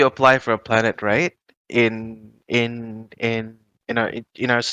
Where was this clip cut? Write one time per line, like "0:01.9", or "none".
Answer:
none